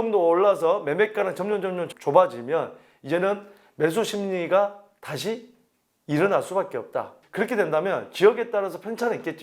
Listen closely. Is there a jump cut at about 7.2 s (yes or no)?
yes